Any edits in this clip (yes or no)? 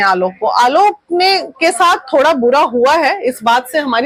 no